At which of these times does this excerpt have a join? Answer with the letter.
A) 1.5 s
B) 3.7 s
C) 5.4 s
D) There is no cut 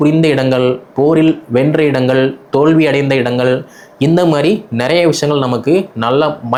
D